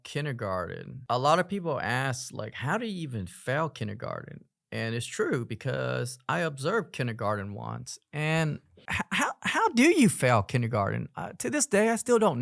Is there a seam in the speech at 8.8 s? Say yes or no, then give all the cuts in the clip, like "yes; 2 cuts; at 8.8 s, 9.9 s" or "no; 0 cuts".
yes; 2 cuts; at 1.0 s, 8.8 s